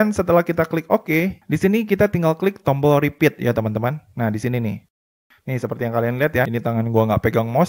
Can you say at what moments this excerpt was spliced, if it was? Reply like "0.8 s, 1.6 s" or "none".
4.9 s